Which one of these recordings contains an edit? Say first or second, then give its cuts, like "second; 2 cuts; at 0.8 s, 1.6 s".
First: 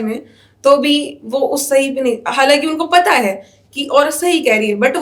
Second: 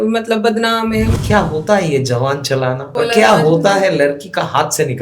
second; 2 cuts; at 1.1 s, 2.9 s